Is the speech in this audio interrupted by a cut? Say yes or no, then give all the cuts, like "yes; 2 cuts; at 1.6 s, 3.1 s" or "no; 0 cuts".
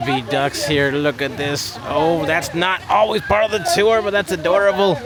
no; 0 cuts